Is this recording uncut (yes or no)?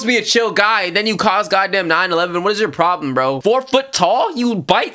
no